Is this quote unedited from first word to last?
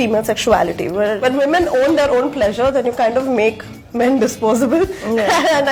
yes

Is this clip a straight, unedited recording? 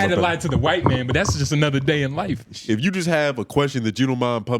no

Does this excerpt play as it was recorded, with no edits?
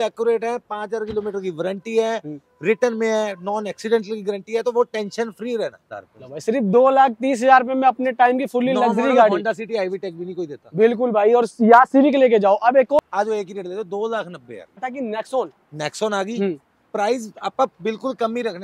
no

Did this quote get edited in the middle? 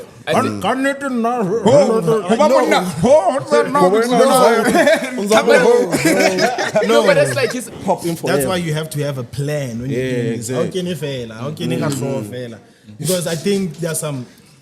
yes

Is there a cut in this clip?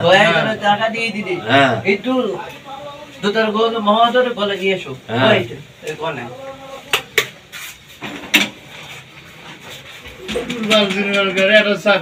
no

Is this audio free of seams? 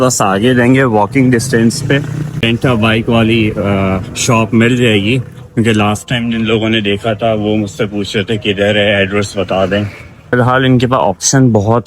no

